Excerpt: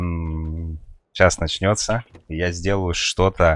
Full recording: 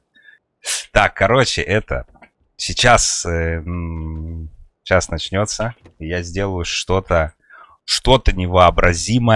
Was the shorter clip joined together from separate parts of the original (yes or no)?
no